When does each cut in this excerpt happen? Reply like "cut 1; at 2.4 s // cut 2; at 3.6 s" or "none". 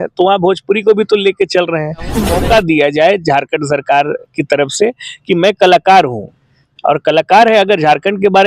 cut 1; at 2.3 s